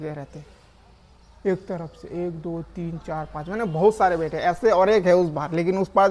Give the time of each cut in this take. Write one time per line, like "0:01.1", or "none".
none